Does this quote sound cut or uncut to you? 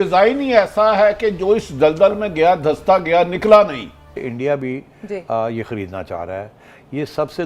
cut